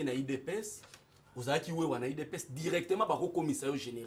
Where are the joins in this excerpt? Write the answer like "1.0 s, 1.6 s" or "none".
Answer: none